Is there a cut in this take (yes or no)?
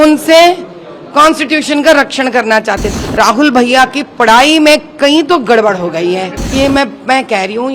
yes